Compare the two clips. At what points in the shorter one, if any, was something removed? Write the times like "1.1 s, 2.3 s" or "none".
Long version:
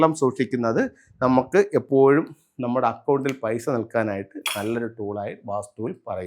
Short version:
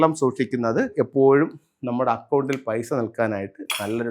0.9 s